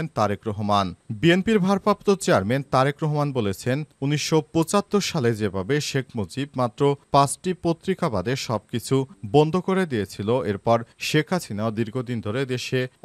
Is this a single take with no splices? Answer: yes; 0 cuts

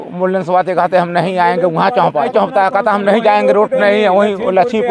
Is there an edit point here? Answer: yes; 1 cut; at 2.3 s

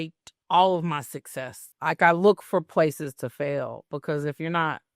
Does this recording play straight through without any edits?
no; 1 cut; at 1.7 s

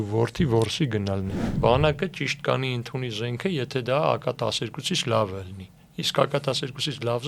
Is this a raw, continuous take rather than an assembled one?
no; 1 cut; at 1.5 s

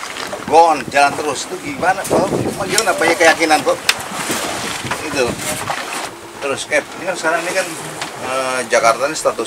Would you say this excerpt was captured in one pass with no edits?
no; 1 cut; at 6.3 s

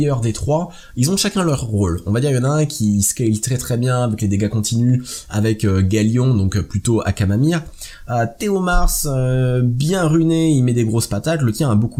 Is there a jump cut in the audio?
no; 0 cuts

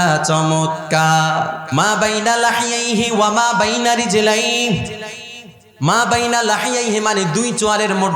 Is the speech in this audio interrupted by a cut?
yes; 1 cut; at 1.6 s

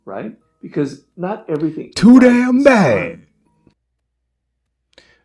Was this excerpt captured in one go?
no; 1 cut; at 3.7 s

